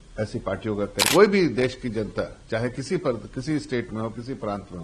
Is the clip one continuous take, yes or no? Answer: no